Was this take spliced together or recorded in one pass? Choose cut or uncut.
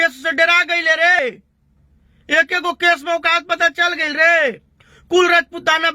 cut